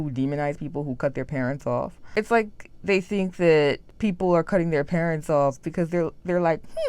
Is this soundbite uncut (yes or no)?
no